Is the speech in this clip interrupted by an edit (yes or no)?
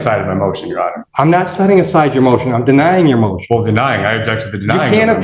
yes